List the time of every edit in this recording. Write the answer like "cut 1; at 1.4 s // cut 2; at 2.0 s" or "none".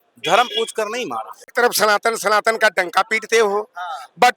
cut 1; at 1.5 s